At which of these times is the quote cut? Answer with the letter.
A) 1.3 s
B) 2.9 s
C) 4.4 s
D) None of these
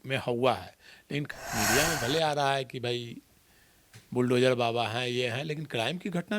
A